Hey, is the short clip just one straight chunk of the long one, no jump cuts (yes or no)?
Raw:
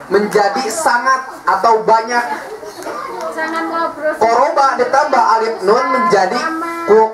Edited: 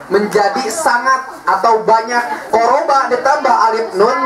no